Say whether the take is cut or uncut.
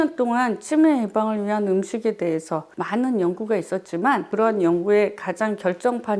cut